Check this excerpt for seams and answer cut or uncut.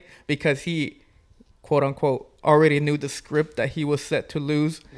uncut